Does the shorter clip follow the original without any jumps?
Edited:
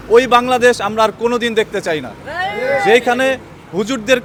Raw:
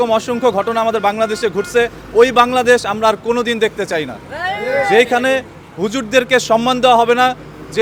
yes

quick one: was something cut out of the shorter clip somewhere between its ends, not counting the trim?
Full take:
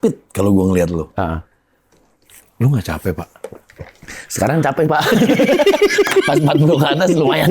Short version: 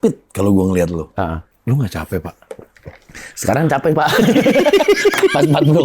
yes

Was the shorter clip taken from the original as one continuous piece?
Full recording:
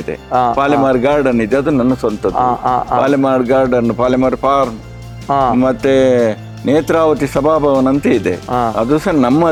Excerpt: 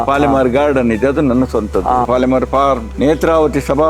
no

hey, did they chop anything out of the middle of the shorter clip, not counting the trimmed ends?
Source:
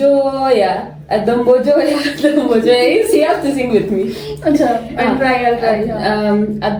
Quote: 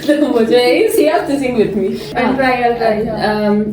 yes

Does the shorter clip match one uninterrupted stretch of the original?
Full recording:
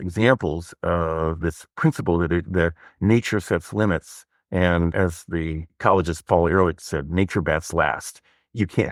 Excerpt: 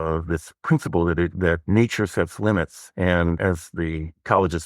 no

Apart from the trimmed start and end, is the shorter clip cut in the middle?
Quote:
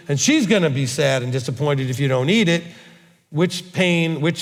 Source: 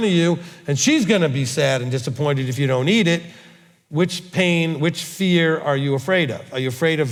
no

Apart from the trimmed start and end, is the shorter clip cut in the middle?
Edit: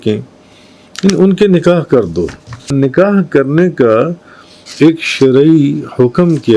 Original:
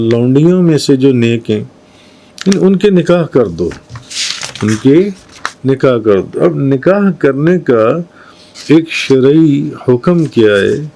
yes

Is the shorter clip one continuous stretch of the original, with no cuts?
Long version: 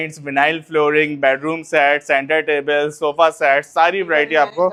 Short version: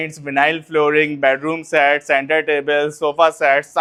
yes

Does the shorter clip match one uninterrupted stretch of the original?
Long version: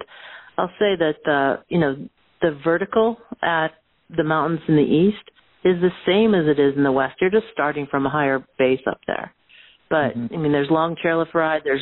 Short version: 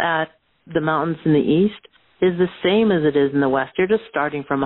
yes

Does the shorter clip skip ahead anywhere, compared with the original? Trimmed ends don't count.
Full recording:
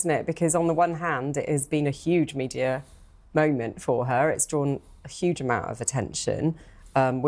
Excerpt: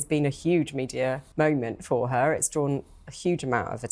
yes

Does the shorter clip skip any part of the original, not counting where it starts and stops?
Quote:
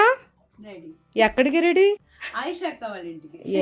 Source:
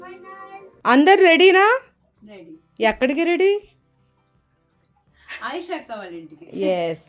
yes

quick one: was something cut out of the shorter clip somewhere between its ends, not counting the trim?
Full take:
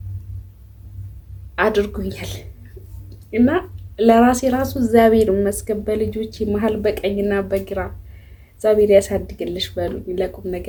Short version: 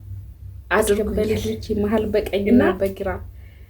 yes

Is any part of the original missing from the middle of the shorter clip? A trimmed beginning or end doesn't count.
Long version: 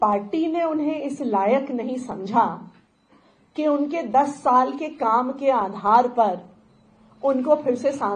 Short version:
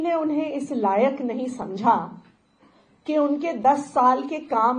no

